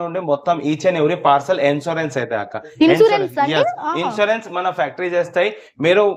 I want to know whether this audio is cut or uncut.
uncut